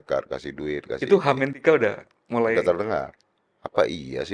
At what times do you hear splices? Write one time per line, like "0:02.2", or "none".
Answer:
none